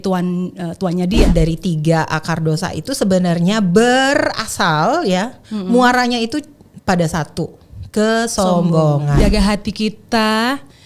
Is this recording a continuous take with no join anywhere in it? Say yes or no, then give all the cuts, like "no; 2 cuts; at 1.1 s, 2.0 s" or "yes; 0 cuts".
no; 2 cuts; at 1.3 s, 9.2 s